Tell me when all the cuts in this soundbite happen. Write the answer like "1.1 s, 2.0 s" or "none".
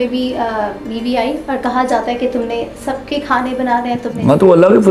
none